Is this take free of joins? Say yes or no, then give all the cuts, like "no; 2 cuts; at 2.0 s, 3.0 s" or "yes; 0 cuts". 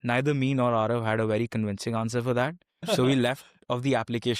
no; 1 cut; at 2.9 s